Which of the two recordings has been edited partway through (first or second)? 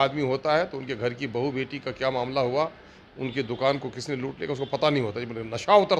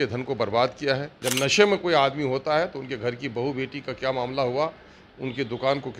second